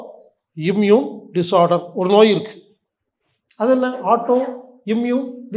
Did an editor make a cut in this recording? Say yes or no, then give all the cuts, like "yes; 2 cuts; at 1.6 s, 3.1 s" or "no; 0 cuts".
no; 0 cuts